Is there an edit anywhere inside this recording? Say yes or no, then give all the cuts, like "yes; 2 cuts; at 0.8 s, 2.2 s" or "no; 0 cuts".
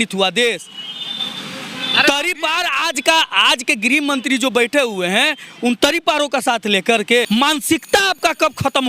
yes; 1 cut; at 7.3 s